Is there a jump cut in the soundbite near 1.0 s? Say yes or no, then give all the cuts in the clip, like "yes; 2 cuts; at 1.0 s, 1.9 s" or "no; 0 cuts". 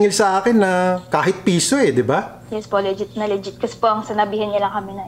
no; 1 cut; at 2.4 s